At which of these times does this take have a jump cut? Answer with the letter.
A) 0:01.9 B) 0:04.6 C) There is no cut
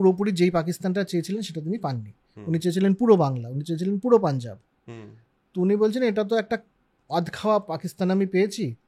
C